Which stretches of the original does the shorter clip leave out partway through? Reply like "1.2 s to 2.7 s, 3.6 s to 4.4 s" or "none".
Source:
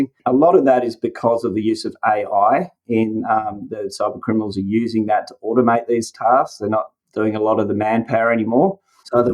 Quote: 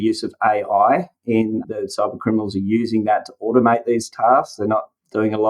3.2 s to 3.6 s